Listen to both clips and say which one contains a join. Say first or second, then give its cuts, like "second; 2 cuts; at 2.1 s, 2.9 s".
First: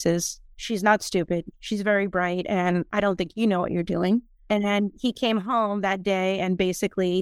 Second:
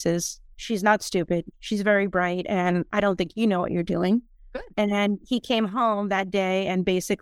first; 1 cut; at 4.3 s